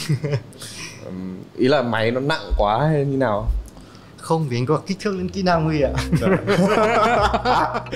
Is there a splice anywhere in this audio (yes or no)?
no